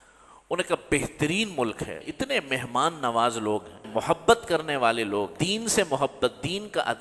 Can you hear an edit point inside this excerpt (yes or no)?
yes